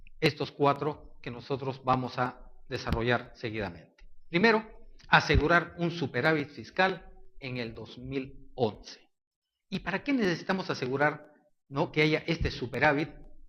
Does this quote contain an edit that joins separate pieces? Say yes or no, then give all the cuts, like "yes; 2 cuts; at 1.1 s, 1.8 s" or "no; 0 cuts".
yes; 1 cut; at 5.2 s